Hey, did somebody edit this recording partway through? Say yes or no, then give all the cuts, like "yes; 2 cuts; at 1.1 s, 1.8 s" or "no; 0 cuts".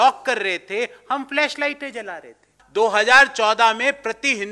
yes; 1 cut; at 2.6 s